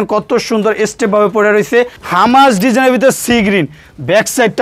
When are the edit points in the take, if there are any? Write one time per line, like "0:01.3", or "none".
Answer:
0:02.0